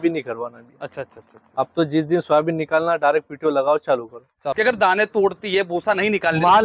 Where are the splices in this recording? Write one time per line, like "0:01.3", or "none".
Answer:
0:04.5